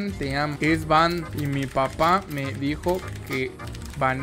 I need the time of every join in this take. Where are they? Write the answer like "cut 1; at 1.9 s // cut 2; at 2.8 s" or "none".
none